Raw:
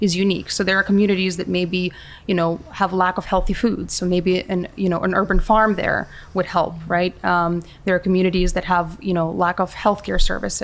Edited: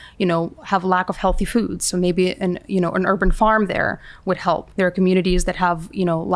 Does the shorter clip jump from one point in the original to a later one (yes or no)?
yes